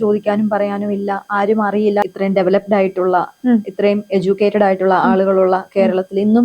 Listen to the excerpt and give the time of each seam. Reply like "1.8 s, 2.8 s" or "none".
2.1 s